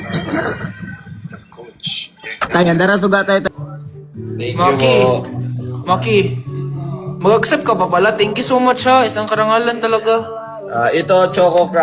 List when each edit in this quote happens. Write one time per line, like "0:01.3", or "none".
0:03.4

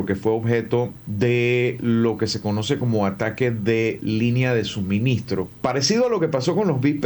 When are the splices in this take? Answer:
0:01.0
0:05.5

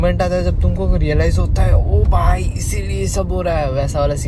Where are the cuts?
none

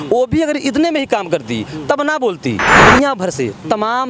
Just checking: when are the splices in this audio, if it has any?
0:02.7

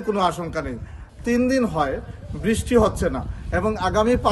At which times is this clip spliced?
0:01.0

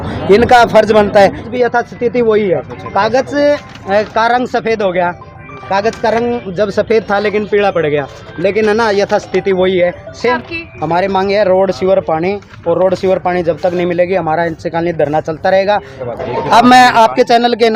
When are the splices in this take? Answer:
0:01.4
0:10.4
0:16.0

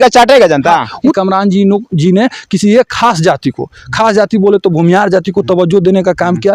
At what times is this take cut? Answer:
0:01.0

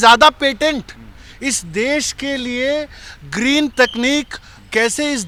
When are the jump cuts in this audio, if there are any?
none

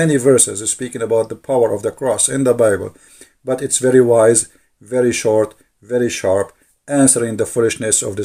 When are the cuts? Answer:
none

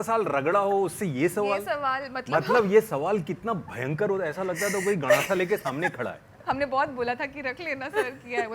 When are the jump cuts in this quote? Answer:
0:06.3

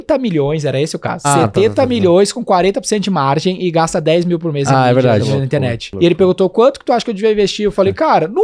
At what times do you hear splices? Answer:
0:01.3
0:05.8

